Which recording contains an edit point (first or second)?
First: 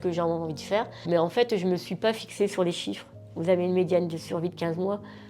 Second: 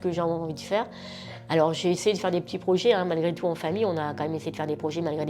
first